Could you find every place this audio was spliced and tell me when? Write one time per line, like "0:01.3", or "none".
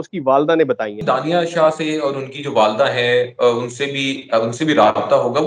0:01.0